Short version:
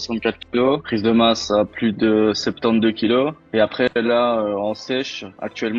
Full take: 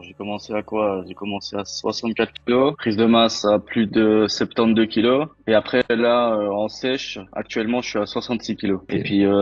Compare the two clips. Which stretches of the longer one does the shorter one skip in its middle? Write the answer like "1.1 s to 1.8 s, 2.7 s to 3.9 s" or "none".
none